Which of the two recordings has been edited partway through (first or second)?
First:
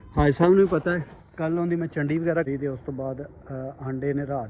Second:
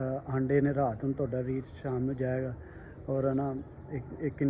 first